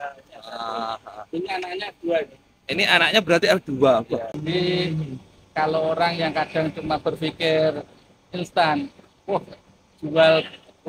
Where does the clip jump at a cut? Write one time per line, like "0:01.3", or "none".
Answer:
0:04.3